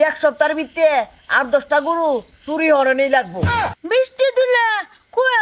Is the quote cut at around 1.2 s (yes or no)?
no